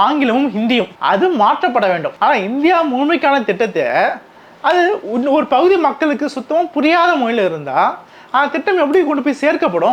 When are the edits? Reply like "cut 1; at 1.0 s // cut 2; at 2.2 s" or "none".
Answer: cut 1; at 2.1 s